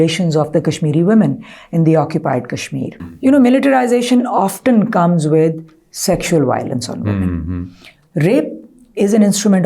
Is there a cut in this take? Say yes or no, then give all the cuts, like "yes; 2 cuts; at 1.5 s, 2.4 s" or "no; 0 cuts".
yes; 1 cut; at 3.0 s